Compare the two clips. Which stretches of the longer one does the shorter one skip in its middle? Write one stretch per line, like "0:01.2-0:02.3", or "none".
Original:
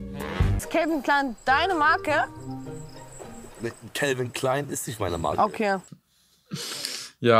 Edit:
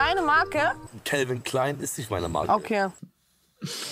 0:02.5-0:03.8